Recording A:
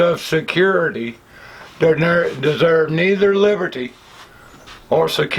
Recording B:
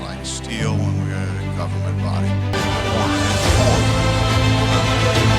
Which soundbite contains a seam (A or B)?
B